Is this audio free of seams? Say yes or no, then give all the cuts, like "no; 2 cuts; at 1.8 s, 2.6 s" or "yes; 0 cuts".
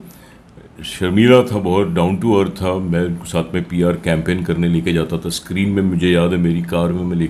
yes; 0 cuts